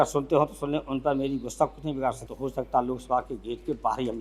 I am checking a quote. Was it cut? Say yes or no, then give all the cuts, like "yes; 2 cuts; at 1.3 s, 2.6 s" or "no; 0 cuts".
yes; 1 cut; at 2.3 s